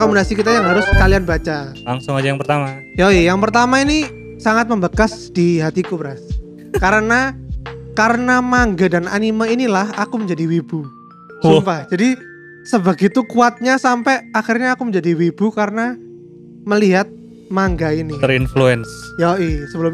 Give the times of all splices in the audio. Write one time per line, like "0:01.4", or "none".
none